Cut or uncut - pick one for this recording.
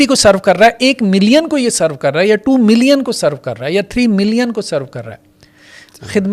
uncut